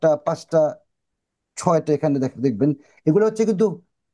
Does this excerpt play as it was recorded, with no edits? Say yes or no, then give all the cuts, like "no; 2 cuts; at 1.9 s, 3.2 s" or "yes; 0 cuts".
yes; 0 cuts